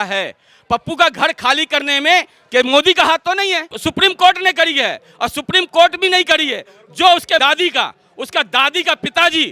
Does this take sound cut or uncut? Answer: cut